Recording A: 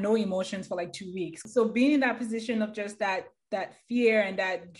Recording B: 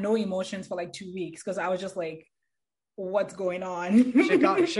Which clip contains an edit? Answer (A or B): A